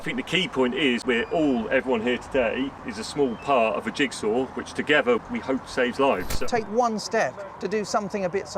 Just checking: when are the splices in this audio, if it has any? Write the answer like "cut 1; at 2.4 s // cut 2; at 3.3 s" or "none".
cut 1; at 1.0 s // cut 2; at 2.9 s // cut 3; at 5.2 s // cut 4; at 6.3 s